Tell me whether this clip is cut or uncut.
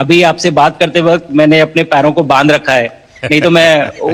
uncut